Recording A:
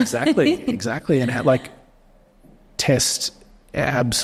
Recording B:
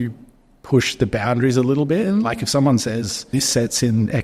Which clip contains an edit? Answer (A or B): B